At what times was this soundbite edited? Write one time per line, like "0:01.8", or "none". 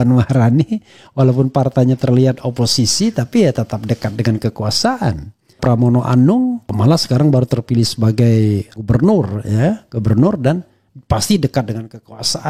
0:05.6
0:06.7
0:08.7